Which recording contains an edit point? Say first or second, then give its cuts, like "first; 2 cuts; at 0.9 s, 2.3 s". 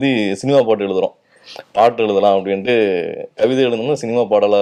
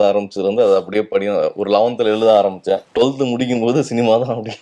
second; 1 cut; at 2.9 s